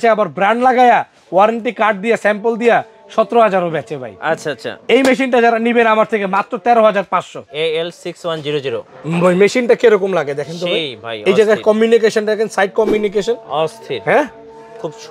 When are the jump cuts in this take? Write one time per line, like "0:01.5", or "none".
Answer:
0:07.4